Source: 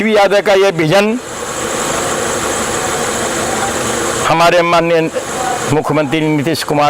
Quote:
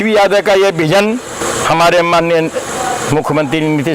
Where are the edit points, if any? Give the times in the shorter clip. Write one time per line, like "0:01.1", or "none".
0:01.4

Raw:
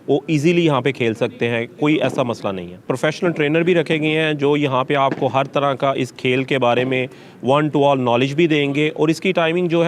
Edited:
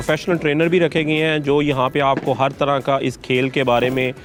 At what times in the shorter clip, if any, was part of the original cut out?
none

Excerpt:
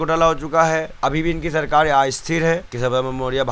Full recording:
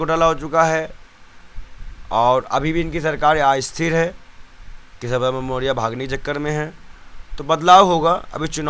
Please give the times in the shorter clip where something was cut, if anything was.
0:01.0
0:02.7

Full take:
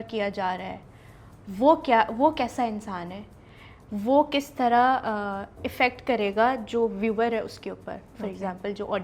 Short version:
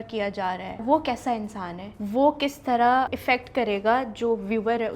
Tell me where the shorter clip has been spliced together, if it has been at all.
0:00.8
0:01.8
0:03.1

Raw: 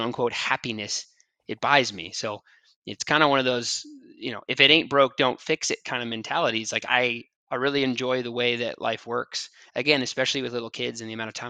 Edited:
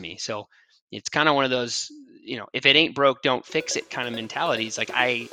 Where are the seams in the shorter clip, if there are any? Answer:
none

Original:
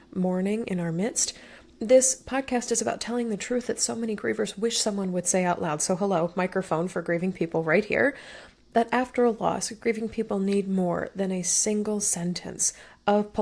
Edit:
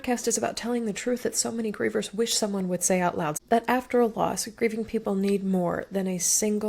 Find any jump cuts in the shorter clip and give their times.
0:03.3

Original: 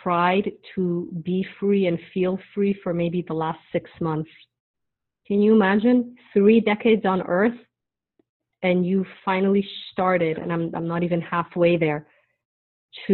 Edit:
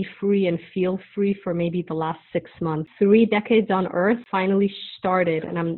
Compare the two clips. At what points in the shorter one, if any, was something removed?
0:02.8
0:04.2

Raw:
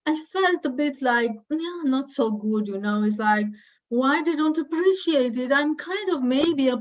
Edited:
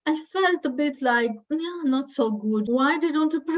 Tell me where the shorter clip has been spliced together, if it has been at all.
0:02.7

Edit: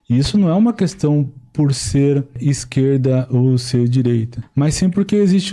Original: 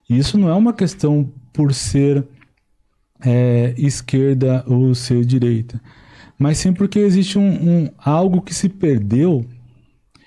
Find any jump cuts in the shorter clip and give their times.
0:02.4
0:04.4

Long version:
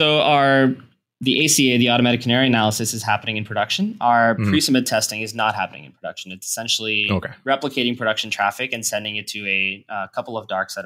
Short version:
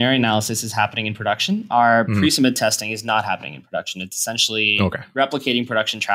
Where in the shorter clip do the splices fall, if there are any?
none

